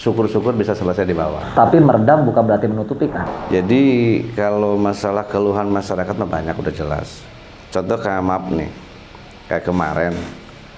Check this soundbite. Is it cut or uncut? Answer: cut